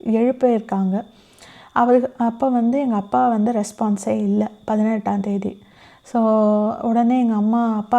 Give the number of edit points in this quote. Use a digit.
0